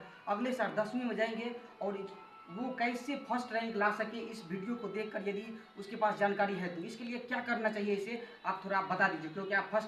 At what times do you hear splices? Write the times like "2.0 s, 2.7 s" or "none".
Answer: none